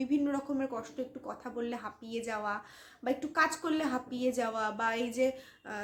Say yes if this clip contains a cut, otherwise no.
no